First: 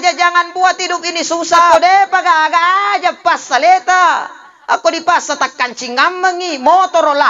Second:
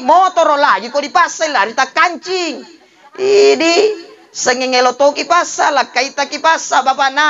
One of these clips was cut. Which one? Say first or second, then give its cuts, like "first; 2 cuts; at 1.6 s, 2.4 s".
first; 1 cut; at 1.7 s